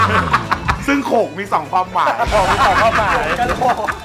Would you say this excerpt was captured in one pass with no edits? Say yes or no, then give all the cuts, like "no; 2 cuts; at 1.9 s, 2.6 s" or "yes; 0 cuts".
yes; 0 cuts